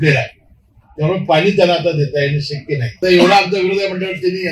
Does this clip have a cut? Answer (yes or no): yes